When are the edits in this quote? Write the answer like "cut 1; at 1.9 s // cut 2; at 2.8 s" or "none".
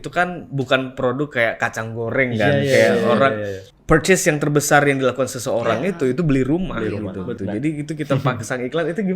cut 1; at 3.7 s // cut 2; at 7.3 s